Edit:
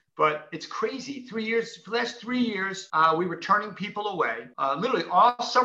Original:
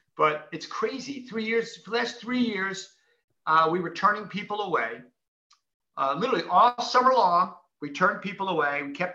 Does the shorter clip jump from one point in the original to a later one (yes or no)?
yes